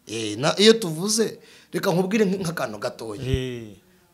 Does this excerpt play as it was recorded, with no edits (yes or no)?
yes